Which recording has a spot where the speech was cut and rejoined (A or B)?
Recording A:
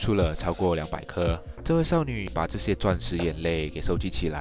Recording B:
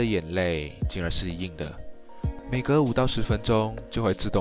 A